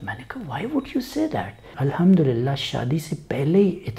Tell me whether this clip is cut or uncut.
cut